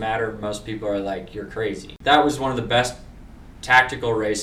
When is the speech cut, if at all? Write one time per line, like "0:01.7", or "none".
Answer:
0:01.9